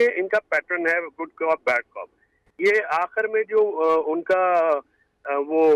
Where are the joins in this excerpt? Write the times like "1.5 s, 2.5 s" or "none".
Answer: none